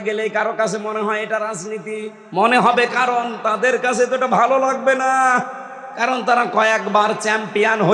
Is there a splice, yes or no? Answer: no